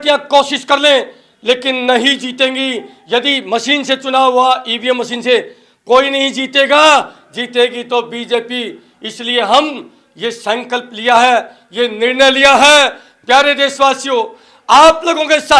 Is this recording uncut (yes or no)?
yes